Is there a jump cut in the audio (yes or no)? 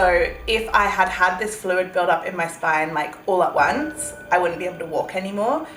no